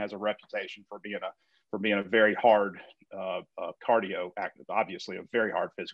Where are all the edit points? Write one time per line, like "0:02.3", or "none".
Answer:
none